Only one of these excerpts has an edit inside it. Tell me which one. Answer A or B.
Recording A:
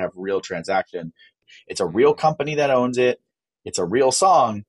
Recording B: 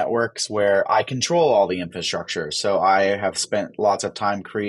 A